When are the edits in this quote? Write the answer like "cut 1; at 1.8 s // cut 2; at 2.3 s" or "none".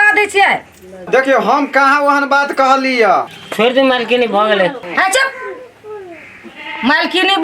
cut 1; at 3.3 s